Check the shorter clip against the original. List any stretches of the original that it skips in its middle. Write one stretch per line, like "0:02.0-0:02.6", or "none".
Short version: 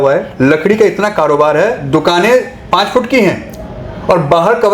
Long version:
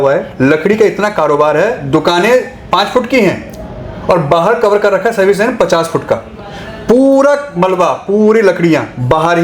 none